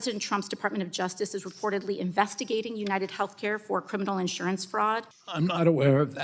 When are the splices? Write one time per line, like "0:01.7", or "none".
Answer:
0:05.2